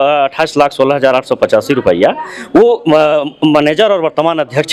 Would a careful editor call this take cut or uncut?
uncut